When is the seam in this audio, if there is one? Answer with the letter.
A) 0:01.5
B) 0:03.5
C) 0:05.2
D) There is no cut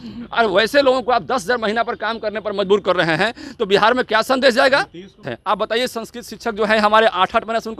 C